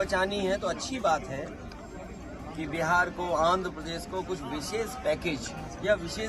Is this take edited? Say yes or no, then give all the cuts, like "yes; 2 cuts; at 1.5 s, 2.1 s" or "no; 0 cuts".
no; 0 cuts